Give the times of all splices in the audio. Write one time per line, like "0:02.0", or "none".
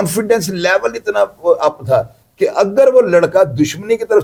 none

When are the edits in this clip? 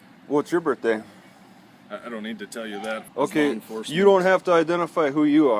0:03.0

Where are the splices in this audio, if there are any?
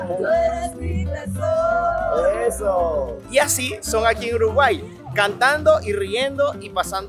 none

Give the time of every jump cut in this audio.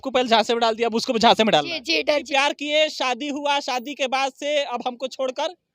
0:02.3

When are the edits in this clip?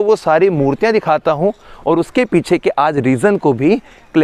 none

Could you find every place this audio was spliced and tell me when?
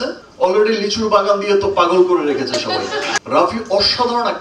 0:03.2

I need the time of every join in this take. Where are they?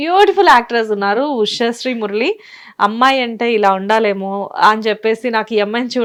none

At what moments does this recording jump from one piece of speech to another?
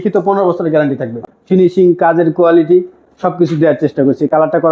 0:01.2

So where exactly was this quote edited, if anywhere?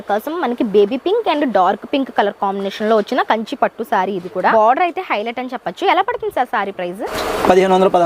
0:04.5
0:07.1

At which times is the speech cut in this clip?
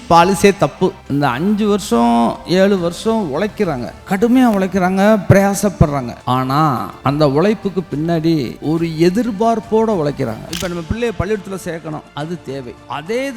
0:01.0
0:03.9
0:06.5
0:08.5
0:10.5
0:12.4

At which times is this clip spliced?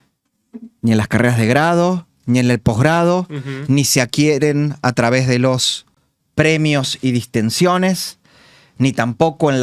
none

